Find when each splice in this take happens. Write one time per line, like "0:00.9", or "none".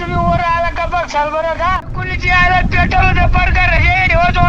0:01.9